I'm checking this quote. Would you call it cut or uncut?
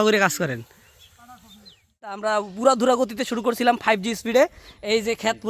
cut